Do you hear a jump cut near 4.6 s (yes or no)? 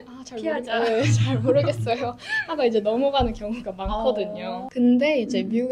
yes